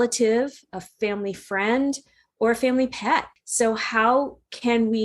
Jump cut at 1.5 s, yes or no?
no